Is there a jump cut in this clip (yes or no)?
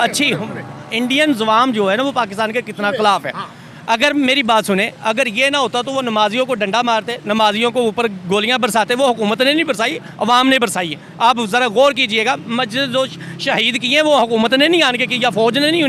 no